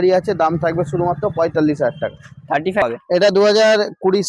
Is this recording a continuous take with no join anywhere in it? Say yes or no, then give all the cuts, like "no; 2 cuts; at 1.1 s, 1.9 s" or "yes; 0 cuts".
no; 1 cut; at 2.8 s